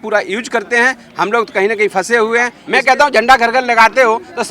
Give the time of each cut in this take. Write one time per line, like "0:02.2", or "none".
0:02.6